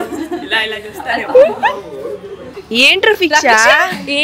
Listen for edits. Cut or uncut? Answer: uncut